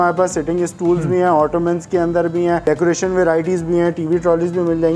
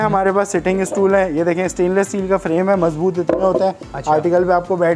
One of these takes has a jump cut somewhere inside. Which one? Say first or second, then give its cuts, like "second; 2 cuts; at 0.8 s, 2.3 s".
first; 1 cut; at 2.6 s